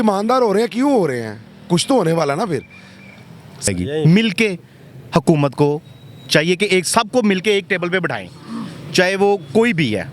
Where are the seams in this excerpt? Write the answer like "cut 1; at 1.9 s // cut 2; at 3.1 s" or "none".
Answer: cut 1; at 3.7 s